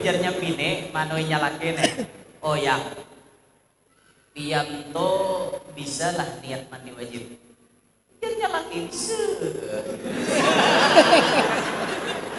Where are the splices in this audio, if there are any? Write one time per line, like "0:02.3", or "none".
none